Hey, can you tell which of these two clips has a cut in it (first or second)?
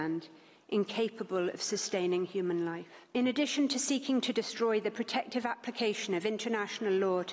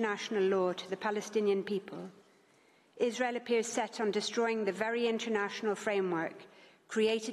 first